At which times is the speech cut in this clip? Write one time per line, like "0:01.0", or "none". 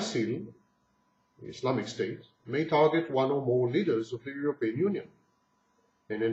none